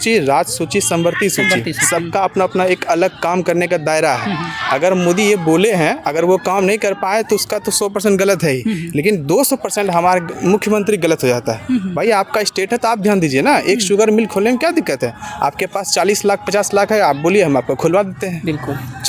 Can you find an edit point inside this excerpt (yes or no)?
no